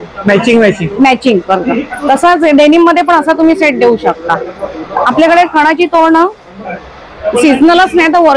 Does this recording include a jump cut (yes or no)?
no